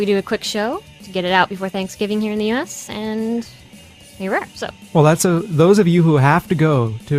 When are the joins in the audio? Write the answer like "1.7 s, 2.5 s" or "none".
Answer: none